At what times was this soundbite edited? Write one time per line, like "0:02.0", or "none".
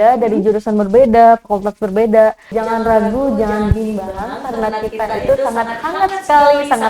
0:02.5